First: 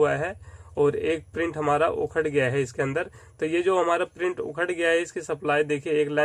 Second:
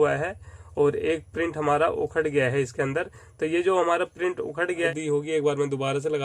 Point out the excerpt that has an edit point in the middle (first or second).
second